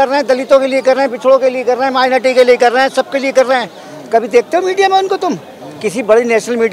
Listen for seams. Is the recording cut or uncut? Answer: uncut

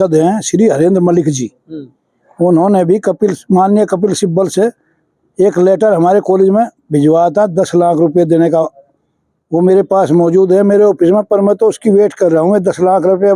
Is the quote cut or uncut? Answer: uncut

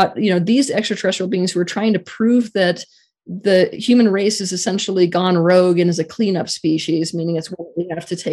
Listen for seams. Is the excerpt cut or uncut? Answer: uncut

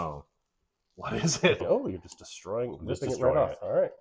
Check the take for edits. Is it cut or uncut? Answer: cut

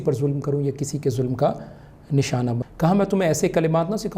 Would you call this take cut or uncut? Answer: cut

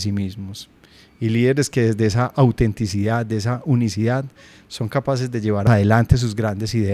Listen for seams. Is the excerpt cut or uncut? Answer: cut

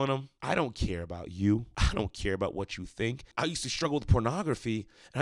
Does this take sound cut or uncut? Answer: cut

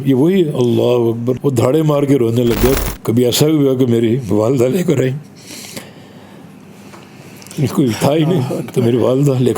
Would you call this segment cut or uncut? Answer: cut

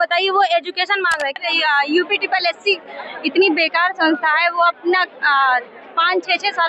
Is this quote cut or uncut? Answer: cut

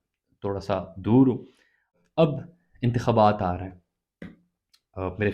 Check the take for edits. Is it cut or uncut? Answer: cut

